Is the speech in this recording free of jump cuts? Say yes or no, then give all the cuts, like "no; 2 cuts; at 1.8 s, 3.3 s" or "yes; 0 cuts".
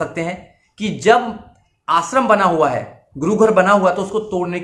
yes; 0 cuts